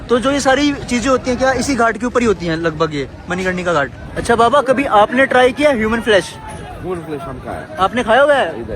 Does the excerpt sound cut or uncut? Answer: cut